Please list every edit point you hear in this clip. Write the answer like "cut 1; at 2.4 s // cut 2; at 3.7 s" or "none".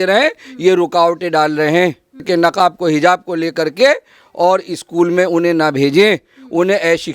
cut 1; at 2.2 s